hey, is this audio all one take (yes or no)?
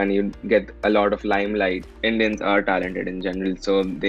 no